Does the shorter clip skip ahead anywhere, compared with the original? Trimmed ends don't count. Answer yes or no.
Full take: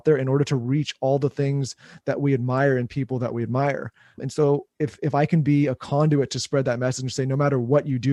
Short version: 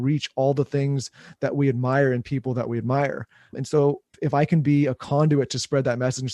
yes